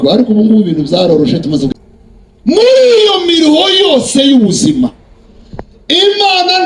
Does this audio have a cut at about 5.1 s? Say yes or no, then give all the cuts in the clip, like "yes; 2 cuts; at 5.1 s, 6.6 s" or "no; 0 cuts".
no; 1 cut; at 1.7 s